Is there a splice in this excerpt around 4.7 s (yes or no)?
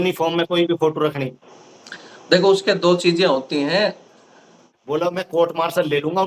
yes